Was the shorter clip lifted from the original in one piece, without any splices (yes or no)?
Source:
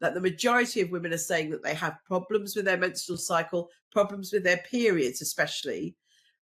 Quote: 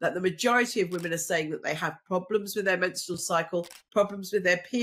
yes